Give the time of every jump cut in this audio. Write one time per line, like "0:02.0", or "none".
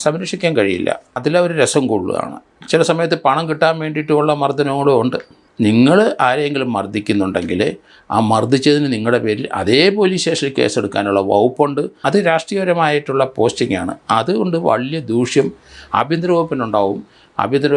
0:01.2
0:05.4
0:11.9